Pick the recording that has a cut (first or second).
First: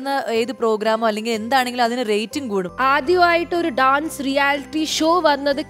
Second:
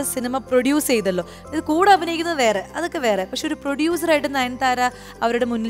first